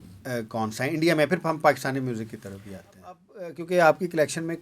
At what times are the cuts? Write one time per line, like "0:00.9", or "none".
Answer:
0:03.3